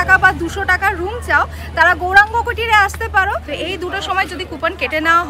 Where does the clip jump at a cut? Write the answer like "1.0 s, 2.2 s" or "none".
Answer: 3.4 s